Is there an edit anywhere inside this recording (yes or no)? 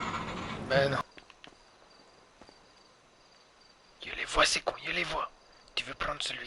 yes